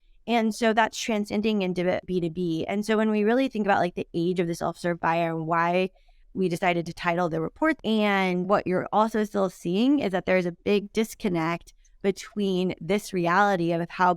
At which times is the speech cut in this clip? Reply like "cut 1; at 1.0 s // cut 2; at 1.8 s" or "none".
cut 1; at 7.8 s